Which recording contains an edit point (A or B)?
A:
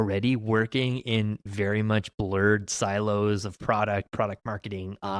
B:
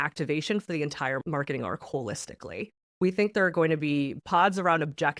B